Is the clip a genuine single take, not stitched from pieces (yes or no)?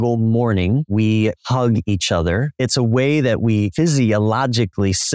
no